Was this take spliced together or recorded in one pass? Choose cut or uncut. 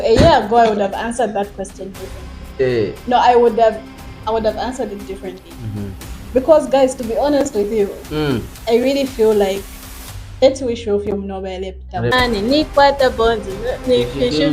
cut